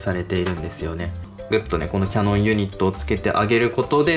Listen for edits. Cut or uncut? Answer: cut